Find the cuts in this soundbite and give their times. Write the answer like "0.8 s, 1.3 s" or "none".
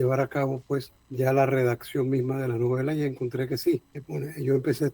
1.0 s, 4.0 s

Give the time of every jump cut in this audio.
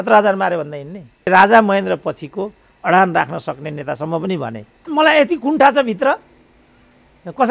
1.3 s, 4.7 s

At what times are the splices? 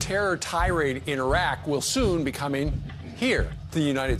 none

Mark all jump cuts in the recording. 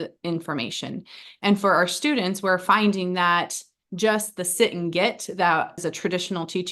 5.8 s

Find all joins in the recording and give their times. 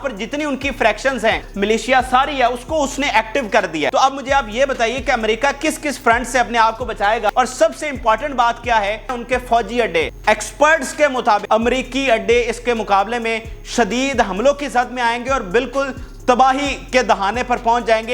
1.5 s, 3.9 s, 7.3 s, 9.1 s, 10.1 s, 11.4 s

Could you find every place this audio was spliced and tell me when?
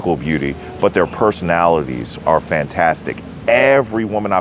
none

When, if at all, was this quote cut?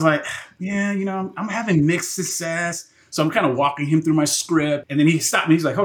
4.8 s

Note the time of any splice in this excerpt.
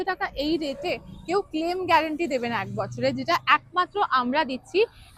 none

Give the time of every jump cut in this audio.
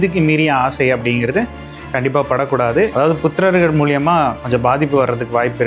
2.9 s

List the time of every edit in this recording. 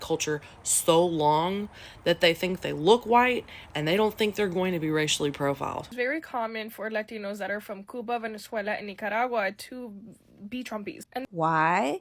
5.9 s, 11.1 s

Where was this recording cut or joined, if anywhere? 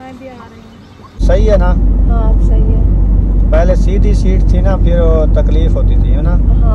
1.2 s

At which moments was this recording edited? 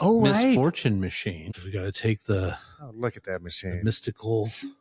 1.4 s

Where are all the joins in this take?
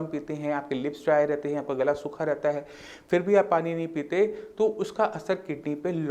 none

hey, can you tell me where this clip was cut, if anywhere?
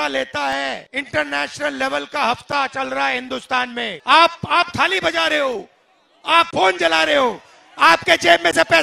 0.9 s, 3.9 s

